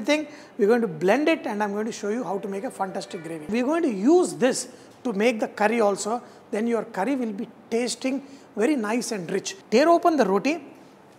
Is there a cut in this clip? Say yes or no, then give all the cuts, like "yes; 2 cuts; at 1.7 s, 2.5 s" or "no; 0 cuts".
yes; 2 cuts; at 3.5 s, 9.5 s